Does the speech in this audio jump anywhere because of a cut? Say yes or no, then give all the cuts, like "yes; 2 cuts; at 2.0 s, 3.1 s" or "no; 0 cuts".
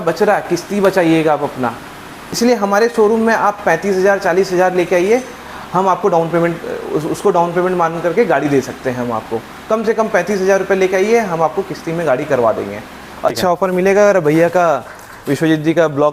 yes; 2 cuts; at 2.2 s, 13.3 s